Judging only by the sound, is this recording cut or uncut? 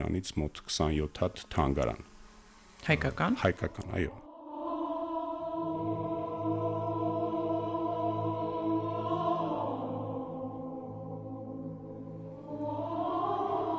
uncut